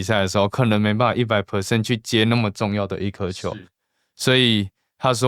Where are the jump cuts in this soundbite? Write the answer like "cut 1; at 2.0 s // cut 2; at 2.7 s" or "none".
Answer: none